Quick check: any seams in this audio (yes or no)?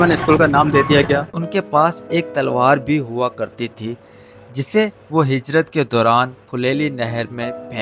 yes